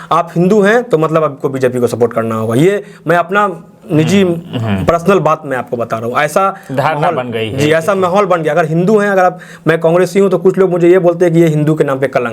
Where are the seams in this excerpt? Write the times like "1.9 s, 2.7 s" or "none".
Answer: none